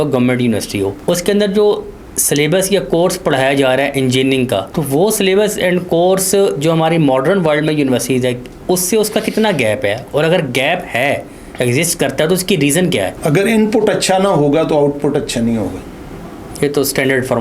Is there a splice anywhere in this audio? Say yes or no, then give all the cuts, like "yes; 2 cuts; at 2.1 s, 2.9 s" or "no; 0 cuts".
yes; 3 cuts; at 1.0 s, 4.7 s, 13.2 s